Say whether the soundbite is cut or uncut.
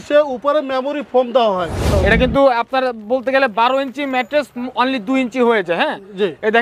cut